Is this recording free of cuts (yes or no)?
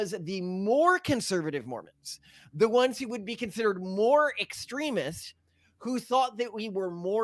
yes